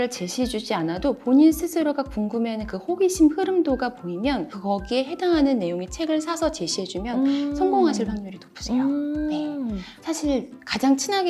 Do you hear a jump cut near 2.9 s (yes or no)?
no